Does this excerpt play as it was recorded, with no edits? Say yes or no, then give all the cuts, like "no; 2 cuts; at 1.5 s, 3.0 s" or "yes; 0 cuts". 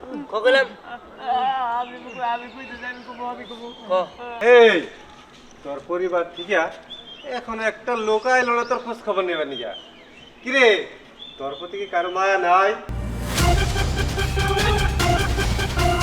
no; 2 cuts; at 4.4 s, 13.0 s